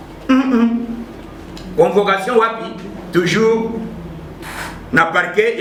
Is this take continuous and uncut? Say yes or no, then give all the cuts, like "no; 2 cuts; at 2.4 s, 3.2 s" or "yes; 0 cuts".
yes; 0 cuts